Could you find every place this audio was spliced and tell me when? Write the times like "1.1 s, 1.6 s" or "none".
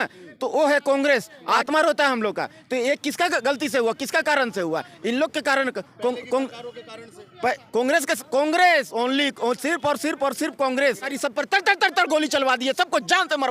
1.6 s, 11.1 s

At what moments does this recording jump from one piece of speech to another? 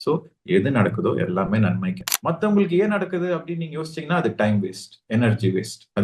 2.0 s

